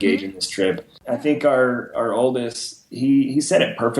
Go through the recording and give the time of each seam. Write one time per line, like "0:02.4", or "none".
0:00.9